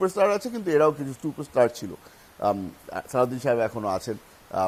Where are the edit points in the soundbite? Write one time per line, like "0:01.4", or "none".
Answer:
none